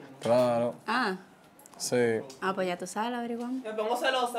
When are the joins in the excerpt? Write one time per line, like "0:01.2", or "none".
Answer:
none